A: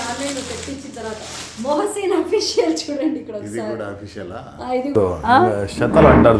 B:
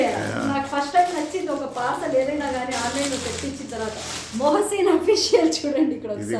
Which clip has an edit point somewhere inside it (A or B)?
A